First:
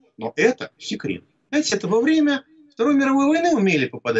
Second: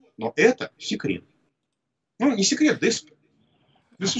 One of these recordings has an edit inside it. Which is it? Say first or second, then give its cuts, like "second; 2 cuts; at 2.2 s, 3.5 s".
first; 1 cut; at 1.5 s